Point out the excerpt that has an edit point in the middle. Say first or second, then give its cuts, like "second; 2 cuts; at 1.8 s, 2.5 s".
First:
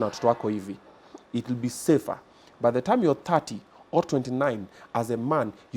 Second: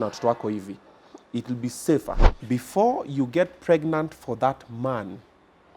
second; 1 cut; at 2.3 s